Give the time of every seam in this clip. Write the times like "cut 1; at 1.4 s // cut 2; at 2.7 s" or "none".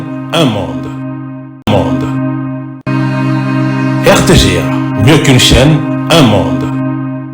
cut 1; at 1.6 s